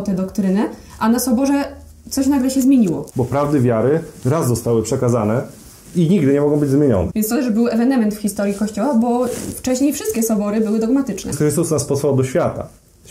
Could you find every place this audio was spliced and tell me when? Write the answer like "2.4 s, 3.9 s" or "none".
3.1 s, 7.1 s, 11.3 s